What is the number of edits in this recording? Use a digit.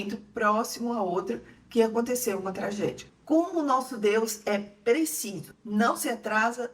1